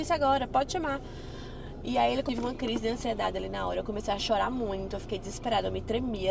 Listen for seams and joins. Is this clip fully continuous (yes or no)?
no